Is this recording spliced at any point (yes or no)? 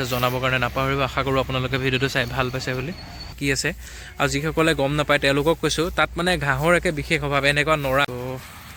yes